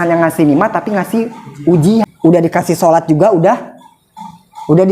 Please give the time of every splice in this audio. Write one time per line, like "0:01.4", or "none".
0:02.1